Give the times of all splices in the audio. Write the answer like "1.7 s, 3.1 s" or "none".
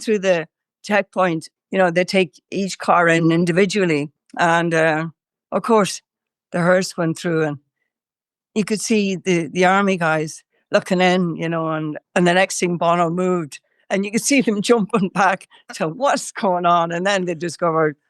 none